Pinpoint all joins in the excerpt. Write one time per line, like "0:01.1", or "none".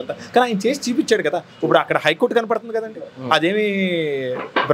none